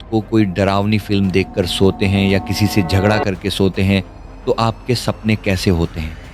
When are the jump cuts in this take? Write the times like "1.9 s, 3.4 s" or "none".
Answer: none

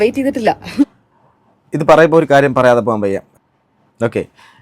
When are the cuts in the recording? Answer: 3.3 s

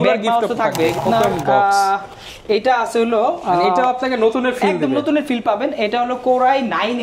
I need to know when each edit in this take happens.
1.0 s

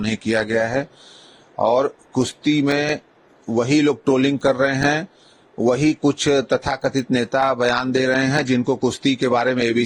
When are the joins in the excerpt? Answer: none

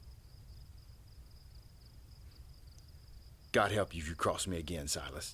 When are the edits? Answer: 1.8 s, 3.5 s

